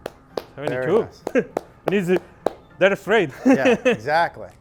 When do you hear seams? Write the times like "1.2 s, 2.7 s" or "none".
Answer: none

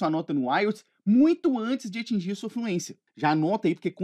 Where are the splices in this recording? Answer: 3.0 s

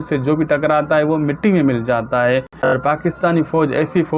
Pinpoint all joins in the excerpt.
2.6 s

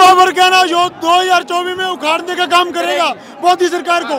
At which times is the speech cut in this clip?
none

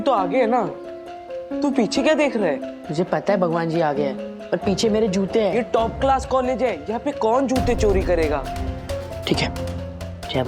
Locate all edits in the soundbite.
5.5 s

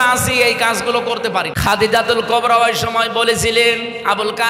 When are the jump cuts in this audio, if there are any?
1.5 s

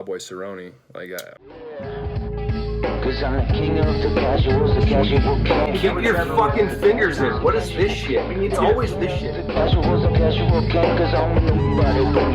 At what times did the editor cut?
1.3 s

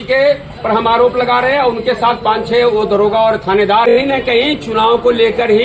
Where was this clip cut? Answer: 3.9 s

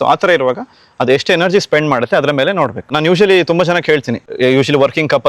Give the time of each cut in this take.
2.9 s, 4.2 s

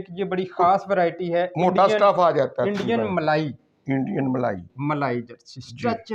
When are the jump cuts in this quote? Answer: none

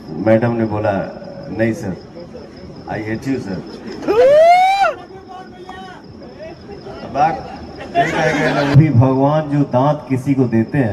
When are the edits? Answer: 8.8 s

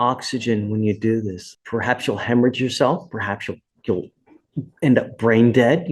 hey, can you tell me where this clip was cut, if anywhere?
1.4 s

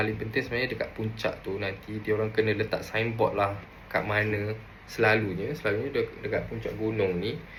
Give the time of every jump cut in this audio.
none

